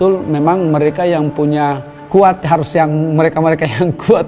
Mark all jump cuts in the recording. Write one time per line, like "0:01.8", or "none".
0:01.9